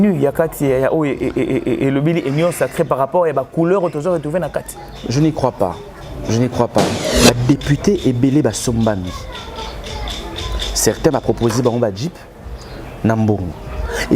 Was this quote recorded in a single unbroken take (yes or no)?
no